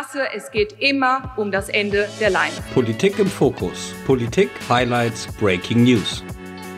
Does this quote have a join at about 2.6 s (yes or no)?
yes